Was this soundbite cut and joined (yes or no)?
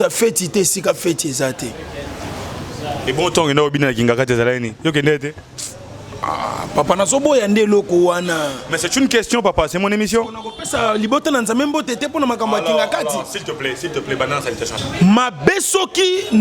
yes